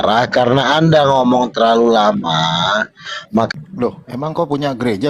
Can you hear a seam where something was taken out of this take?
yes; 1 cut; at 3.5 s

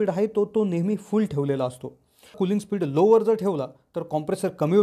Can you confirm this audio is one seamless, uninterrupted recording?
no; 1 cut; at 2.3 s

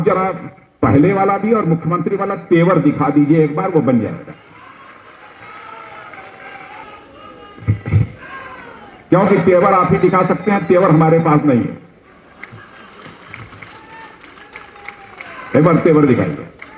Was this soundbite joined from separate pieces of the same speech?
yes; 1 cut; at 6.8 s

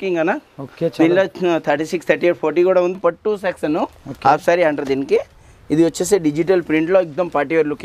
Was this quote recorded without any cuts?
no; 1 cut; at 3.0 s

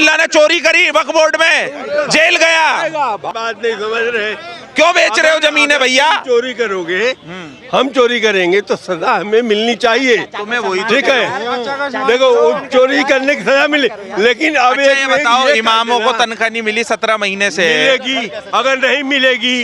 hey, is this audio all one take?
yes; 0 cuts

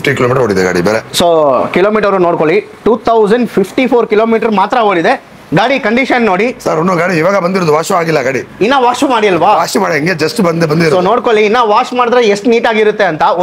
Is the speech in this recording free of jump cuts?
yes; 0 cuts

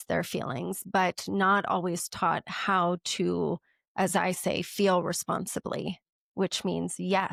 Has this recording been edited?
no; 0 cuts

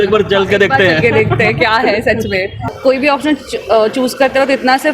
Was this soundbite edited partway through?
yes; 1 cut; at 2.7 s

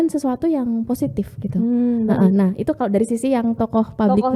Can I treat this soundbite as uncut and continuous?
yes; 0 cuts

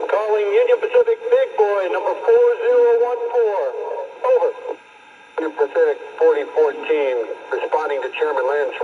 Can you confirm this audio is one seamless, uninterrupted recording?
yes; 0 cuts

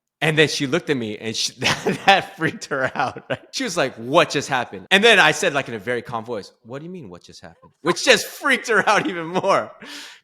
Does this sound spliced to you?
yes; 2 cuts; at 3.5 s, 4.8 s

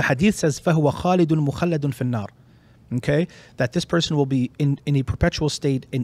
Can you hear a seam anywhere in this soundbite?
no; 0 cuts

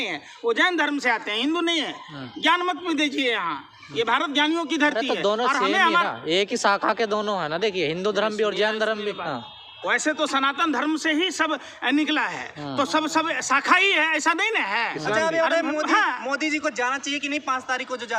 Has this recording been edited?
no; 0 cuts

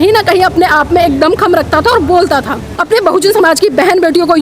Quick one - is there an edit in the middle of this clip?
yes; 1 cut; at 2.7 s

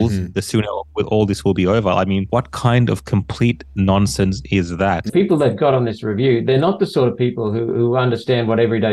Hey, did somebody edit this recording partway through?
yes; 2 cuts; at 2.3 s, 5.1 s

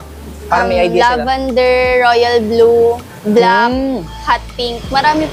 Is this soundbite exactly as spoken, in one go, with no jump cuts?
yes; 0 cuts

